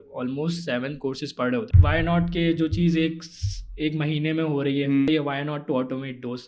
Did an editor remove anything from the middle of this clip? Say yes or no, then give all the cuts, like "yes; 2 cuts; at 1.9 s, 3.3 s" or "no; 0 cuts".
yes; 2 cuts; at 1.7 s, 5.1 s